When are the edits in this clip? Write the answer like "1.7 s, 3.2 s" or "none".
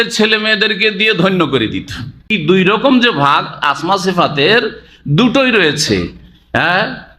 2.4 s